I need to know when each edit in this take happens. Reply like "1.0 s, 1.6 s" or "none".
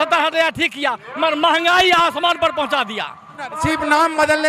3.5 s